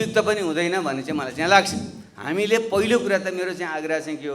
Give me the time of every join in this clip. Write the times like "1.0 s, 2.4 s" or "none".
none

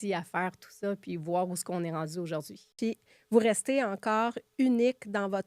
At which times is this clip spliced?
2.7 s

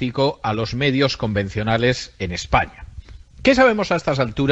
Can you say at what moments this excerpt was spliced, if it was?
3.0 s

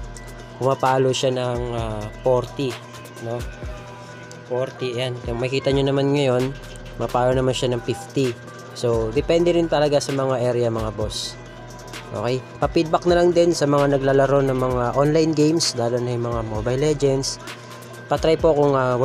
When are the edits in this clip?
none

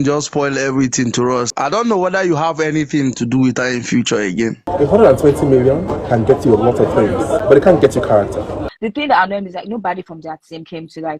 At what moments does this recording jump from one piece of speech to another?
1.7 s, 4.6 s, 6.2 s, 7.4 s, 8.7 s

